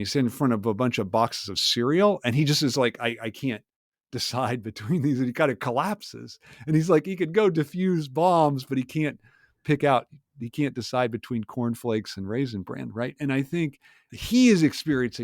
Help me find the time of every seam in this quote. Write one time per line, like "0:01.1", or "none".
0:14.1